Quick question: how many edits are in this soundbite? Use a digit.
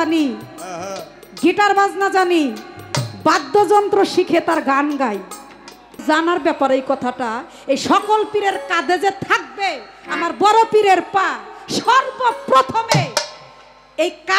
1